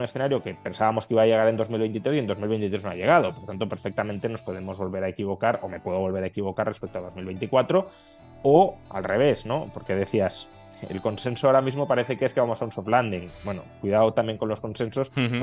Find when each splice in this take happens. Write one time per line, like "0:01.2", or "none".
none